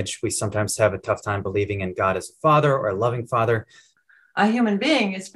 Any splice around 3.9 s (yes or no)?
yes